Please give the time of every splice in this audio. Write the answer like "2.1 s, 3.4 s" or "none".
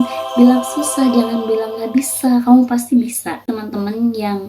3.5 s